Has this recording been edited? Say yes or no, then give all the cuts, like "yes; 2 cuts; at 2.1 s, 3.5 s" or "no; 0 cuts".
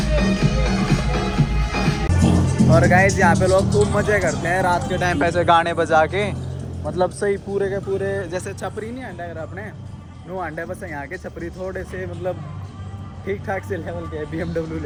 no; 0 cuts